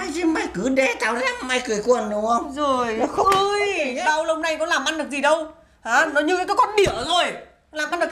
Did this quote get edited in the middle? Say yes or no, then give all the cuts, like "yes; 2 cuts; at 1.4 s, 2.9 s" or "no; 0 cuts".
no; 0 cuts